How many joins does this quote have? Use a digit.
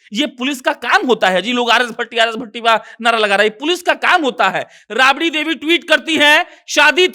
1